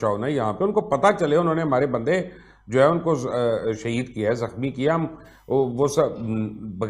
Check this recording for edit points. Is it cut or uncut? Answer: uncut